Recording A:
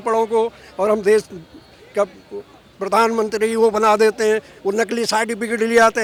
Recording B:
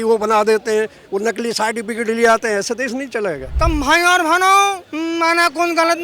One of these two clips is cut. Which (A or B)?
B